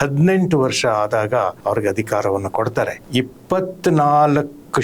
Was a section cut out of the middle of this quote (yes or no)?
yes